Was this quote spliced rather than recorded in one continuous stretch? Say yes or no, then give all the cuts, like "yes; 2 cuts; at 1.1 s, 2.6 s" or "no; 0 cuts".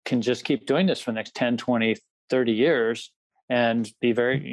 no; 0 cuts